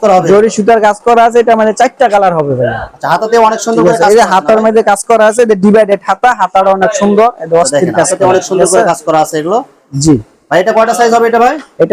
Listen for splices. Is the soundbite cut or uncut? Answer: uncut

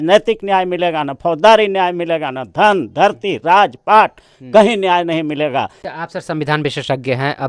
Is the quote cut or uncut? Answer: cut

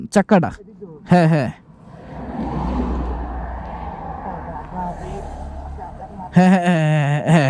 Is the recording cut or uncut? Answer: uncut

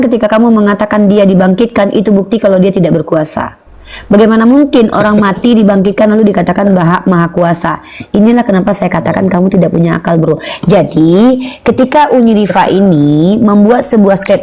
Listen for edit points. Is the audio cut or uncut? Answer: uncut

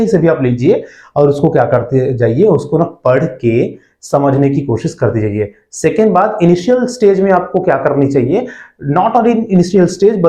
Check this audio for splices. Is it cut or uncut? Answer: uncut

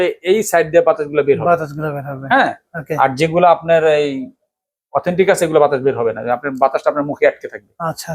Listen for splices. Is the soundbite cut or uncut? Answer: uncut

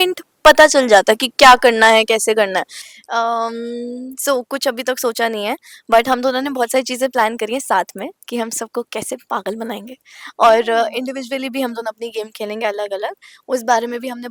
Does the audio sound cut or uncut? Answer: uncut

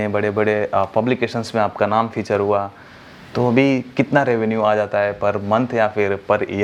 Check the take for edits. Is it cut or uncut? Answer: uncut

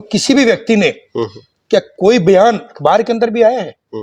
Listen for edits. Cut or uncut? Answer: uncut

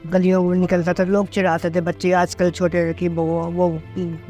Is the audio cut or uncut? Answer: uncut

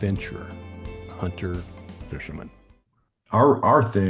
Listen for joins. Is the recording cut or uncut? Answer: uncut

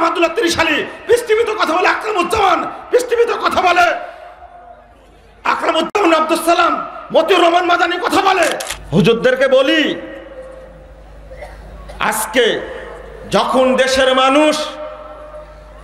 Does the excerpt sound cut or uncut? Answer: cut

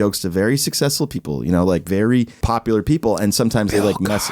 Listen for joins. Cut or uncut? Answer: cut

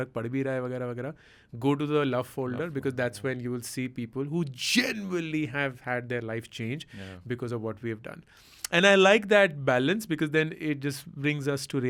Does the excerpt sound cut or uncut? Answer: uncut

